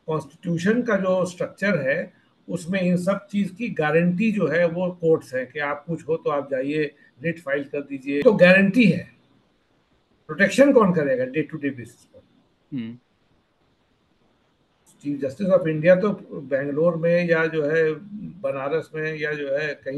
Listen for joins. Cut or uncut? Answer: cut